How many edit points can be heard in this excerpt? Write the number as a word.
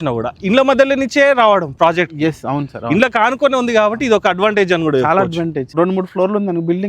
one